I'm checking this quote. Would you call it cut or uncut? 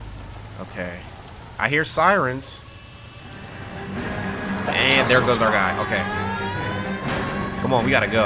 uncut